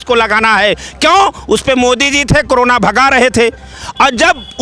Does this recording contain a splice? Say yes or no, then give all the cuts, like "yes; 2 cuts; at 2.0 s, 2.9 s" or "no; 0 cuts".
no; 0 cuts